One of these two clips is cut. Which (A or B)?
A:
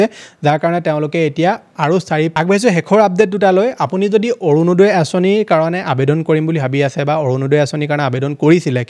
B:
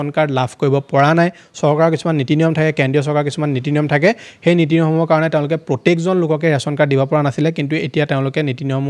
A